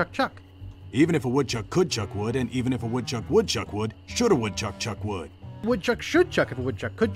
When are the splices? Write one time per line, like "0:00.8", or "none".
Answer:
0:05.6